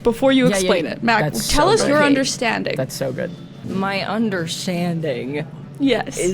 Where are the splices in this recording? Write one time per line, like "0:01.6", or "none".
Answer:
0:03.5